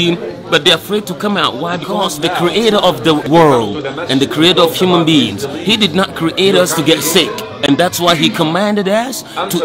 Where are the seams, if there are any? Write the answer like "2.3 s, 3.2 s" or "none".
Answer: 2.0 s, 3.3 s